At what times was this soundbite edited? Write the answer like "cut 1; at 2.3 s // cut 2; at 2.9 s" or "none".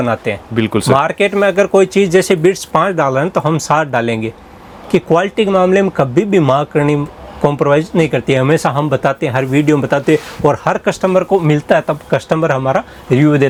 none